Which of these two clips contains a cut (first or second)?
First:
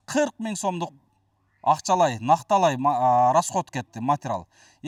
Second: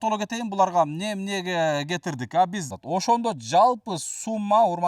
second